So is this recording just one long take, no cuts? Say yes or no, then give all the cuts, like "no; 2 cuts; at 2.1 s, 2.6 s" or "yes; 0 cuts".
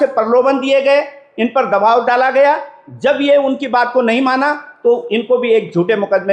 yes; 0 cuts